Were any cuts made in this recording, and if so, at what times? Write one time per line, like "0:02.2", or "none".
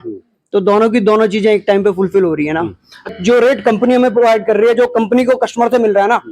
0:03.1